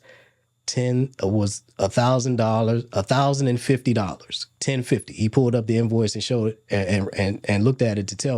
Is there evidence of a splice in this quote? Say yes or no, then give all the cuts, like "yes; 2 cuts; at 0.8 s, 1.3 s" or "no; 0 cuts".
no; 0 cuts